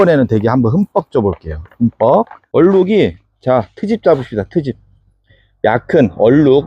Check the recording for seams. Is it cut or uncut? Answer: cut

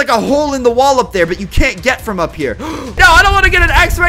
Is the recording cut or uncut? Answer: cut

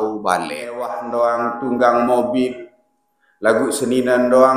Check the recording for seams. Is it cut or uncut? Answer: cut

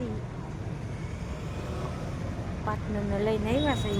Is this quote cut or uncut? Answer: uncut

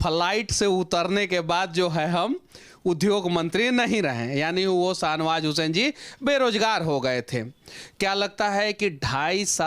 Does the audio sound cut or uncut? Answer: uncut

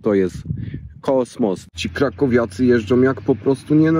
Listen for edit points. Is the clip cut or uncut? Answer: cut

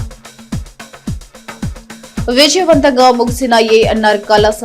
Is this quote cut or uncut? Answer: cut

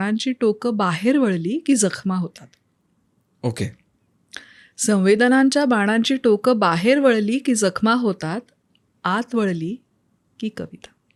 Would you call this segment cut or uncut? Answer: uncut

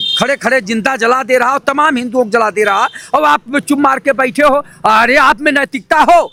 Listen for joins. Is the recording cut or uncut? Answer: uncut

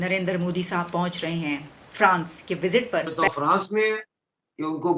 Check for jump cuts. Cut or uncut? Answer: cut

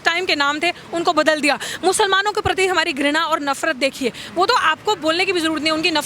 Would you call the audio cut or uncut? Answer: uncut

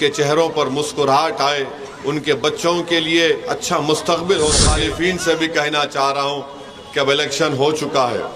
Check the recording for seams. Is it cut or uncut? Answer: cut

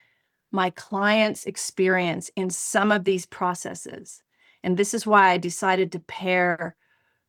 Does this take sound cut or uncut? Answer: uncut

